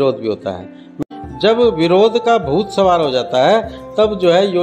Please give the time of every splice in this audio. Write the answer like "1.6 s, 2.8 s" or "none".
0.9 s